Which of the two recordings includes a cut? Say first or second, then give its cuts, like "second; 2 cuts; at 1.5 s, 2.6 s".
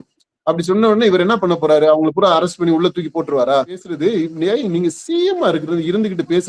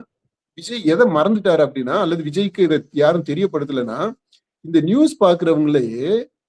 first; 1 cut; at 3.9 s